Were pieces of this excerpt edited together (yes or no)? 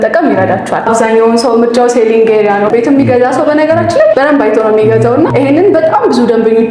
yes